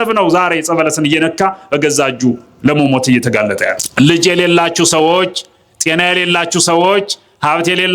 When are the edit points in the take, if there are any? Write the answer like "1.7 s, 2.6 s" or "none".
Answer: 3.8 s